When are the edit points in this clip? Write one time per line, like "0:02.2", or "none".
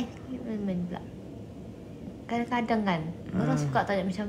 0:01.1